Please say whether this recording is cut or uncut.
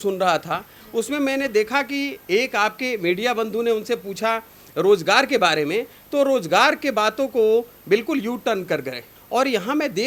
cut